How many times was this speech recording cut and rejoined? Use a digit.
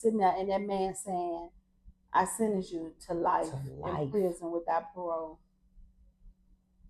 0